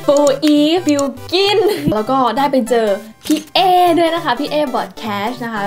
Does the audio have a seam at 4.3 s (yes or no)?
no